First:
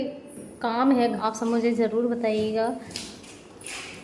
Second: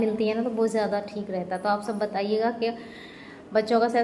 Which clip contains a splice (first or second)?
first